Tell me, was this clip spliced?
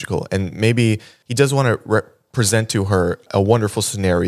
yes; 2 cuts; at 1.2 s, 3.3 s

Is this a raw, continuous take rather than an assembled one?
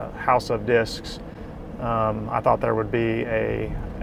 yes; 0 cuts

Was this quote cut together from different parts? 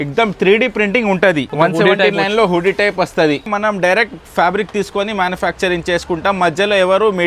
yes; 2 cuts; at 1.5 s, 3.5 s

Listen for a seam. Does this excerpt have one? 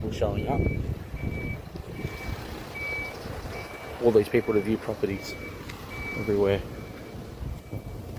no; 0 cuts

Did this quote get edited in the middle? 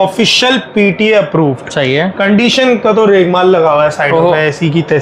no; 0 cuts

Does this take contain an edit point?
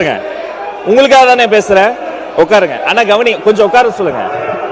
no; 0 cuts

